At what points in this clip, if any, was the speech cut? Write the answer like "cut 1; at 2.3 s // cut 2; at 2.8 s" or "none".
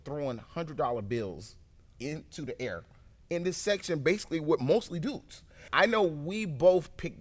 cut 1; at 5.6 s